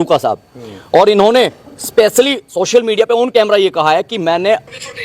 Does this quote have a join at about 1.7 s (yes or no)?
no